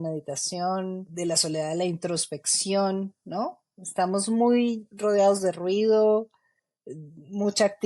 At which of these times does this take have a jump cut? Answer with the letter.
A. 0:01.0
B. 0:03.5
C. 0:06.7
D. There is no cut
A